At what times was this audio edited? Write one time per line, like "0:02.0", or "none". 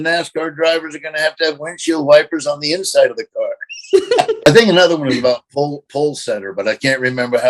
0:04.5

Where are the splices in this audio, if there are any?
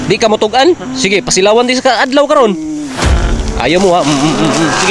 0:03.0

